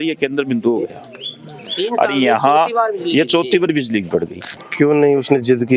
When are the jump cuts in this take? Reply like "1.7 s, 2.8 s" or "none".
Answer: 4.6 s

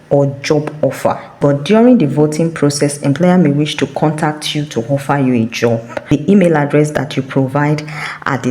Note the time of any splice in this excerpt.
1.4 s, 6.1 s

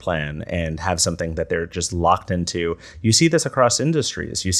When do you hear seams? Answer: none

